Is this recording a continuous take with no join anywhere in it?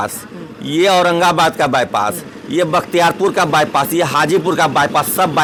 yes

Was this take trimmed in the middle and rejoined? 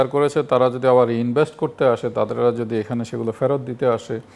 no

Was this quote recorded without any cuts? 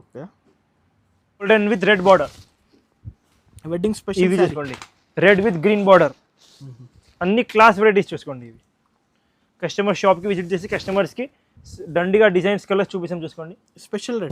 no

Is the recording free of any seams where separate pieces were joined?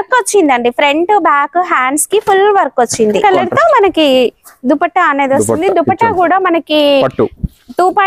no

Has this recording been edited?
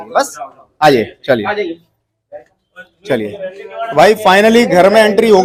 no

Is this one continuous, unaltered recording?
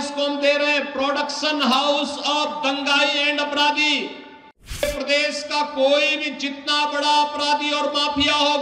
no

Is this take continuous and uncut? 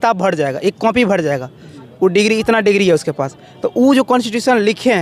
yes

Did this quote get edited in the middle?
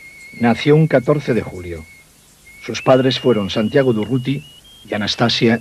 yes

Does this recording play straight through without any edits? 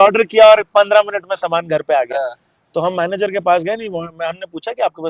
yes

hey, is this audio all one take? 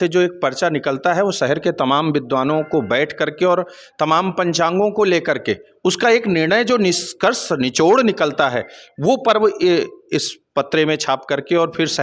yes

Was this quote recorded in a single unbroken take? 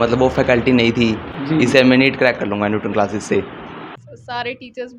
no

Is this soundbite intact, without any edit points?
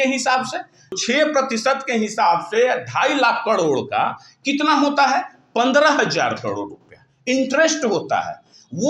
no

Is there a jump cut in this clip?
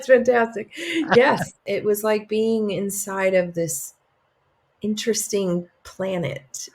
yes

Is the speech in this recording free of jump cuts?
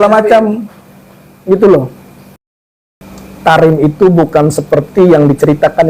no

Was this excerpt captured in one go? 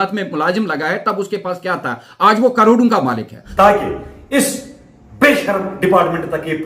no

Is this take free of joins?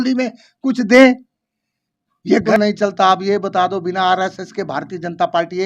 no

